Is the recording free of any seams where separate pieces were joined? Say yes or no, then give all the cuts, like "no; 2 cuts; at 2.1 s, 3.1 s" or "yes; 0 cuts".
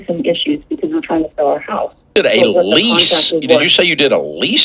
no; 1 cut; at 2.1 s